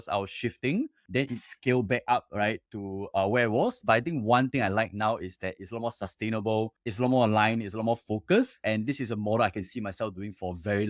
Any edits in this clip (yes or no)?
yes